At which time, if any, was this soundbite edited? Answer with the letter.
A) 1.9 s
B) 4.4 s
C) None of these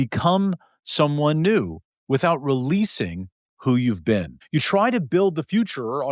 B